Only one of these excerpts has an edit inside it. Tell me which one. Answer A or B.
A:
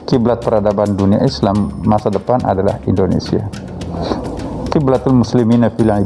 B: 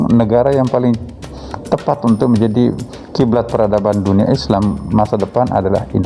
A